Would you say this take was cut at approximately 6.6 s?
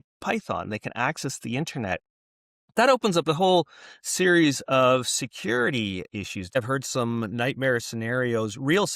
yes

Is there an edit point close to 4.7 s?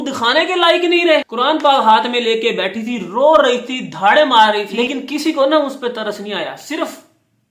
yes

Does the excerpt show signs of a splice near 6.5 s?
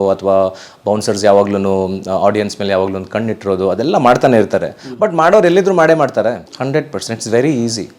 yes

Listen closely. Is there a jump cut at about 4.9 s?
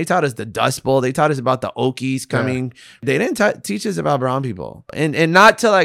yes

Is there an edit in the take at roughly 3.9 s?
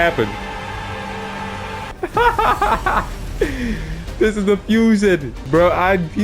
no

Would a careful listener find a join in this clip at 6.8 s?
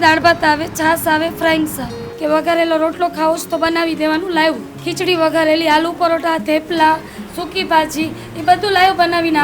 no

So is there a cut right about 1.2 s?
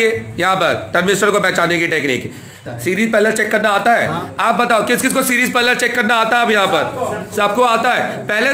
no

